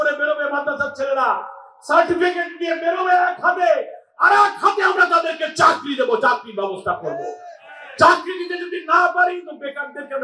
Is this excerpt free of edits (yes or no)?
yes